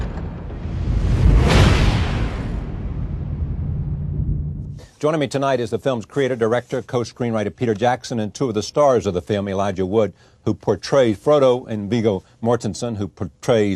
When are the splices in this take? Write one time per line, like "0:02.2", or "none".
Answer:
none